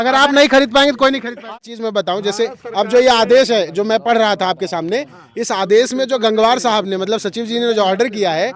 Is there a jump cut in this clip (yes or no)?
yes